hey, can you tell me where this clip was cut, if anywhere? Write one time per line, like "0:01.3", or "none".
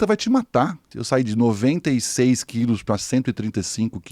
0:00.9

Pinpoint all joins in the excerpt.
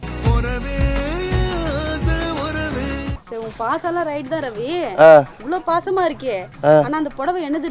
0:03.2

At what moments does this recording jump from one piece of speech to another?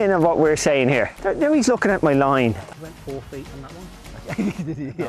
0:01.2
0:02.8

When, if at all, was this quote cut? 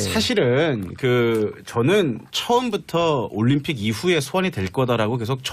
0:03.3

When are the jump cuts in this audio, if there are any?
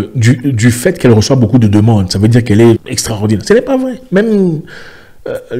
0:02.9

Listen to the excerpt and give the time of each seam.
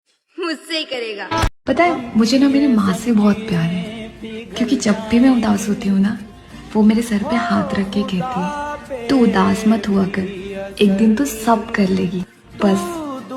none

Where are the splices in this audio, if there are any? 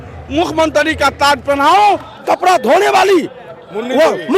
0:02.1

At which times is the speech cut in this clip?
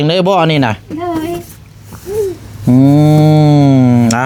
none

